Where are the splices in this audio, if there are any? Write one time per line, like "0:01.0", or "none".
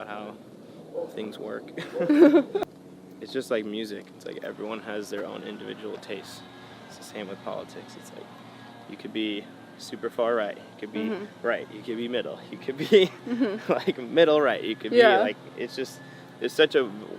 0:02.8